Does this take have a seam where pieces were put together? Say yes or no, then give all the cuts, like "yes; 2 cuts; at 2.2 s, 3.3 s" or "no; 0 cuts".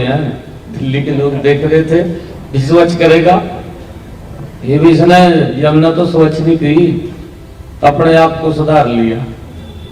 no; 0 cuts